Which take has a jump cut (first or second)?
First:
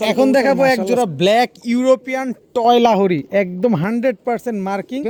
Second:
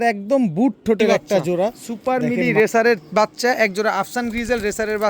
second